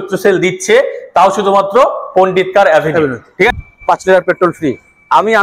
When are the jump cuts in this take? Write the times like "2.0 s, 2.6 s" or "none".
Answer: 3.5 s